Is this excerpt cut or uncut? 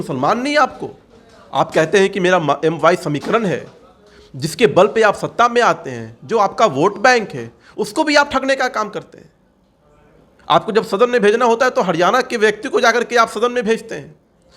uncut